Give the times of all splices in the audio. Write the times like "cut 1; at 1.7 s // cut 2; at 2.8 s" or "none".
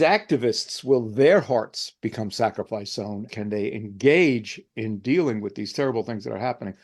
cut 1; at 3.3 s